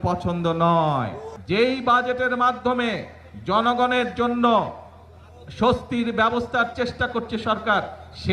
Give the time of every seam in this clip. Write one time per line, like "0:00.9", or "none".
0:01.3